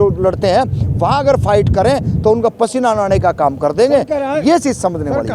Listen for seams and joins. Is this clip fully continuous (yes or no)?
yes